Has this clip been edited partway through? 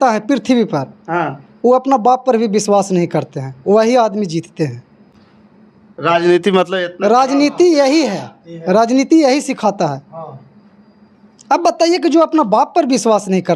no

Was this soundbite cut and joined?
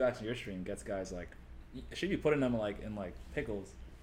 no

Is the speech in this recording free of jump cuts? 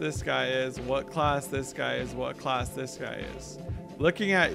yes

